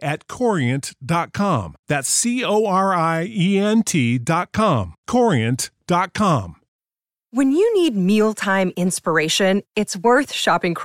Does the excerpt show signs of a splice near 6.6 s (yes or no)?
yes